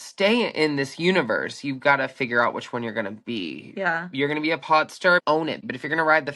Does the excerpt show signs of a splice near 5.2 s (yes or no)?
yes